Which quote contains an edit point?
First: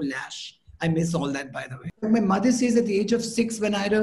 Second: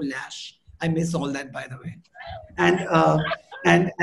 first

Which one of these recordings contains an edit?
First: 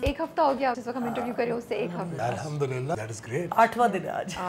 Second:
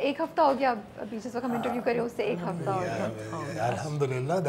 first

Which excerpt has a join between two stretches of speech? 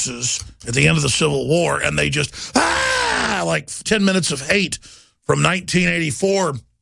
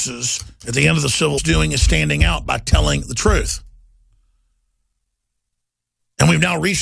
first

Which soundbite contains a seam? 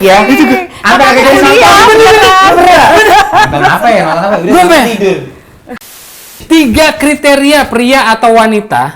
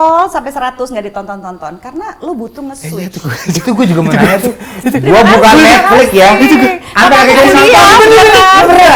first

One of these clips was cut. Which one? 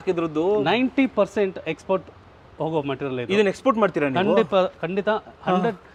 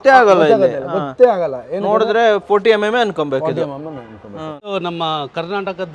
second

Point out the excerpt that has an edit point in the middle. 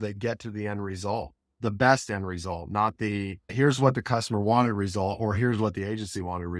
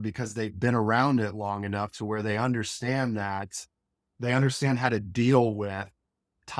first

